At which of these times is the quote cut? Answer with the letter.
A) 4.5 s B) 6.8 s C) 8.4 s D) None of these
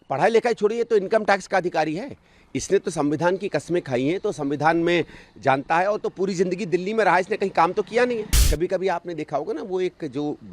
C